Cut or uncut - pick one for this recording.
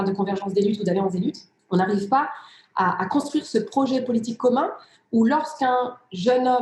cut